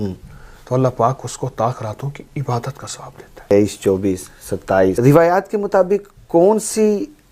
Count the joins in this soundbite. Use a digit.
2